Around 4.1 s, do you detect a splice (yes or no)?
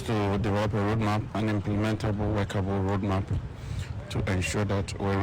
no